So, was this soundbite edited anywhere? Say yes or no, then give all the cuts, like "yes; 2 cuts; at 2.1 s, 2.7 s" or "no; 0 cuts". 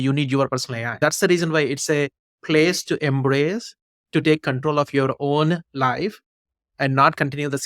yes; 1 cut; at 1.0 s